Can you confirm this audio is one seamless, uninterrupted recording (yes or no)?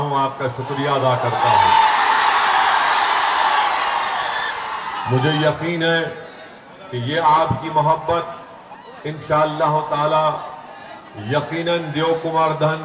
yes